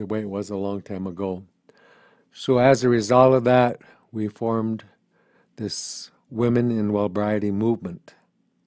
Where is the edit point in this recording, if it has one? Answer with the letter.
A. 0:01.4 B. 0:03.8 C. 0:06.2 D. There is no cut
A